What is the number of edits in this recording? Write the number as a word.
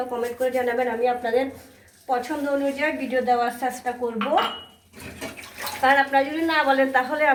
zero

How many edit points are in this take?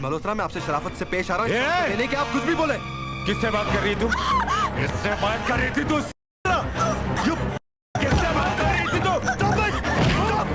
zero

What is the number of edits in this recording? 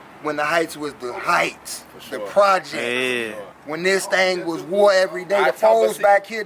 zero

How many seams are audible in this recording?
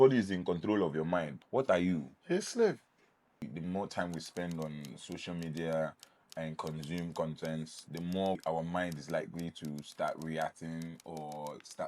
four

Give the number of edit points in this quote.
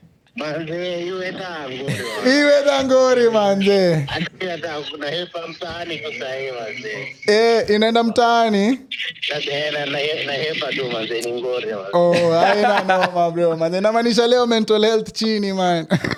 zero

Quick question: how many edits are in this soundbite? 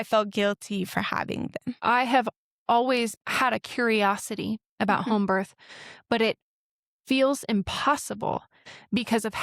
two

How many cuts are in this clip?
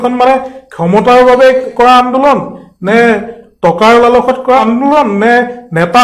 two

